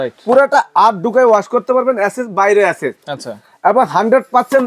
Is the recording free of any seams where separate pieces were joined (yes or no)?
yes